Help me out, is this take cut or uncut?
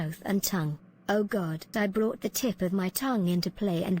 cut